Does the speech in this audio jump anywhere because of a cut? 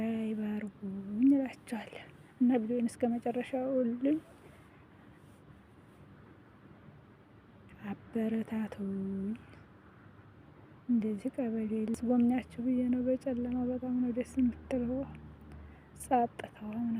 yes; 1 cut; at 12.0 s

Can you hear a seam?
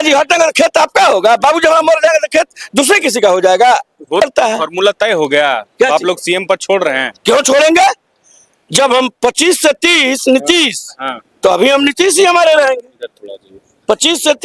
yes; 1 cut; at 4.2 s

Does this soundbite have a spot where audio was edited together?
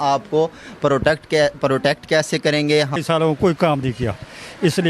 yes; 1 cut; at 3.0 s

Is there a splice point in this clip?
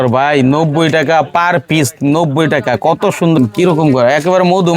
yes; 1 cut; at 3.4 s

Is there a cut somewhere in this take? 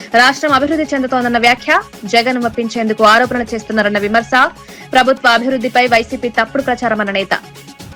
no; 0 cuts

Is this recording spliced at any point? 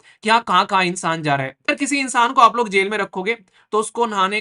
yes; 1 cut; at 1.7 s

